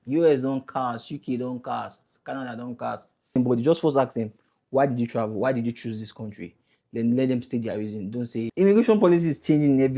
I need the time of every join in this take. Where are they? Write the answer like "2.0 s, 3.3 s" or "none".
3.4 s, 8.5 s